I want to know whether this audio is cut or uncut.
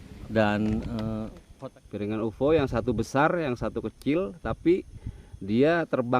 cut